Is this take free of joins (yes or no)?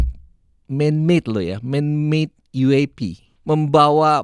no